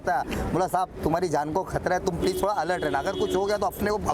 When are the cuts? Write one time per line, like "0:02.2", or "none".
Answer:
none